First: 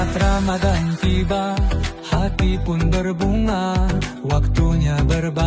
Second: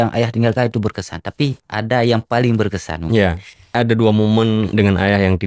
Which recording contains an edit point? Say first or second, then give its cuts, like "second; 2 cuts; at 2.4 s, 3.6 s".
second; 2 cuts; at 3.7 s, 4.7 s